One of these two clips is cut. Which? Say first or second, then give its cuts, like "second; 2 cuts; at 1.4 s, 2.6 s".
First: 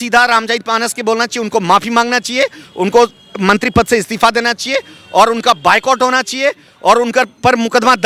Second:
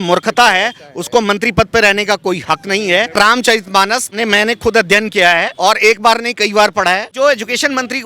second; 4 cuts; at 3.1 s, 4.2 s, 5.5 s, 7.1 s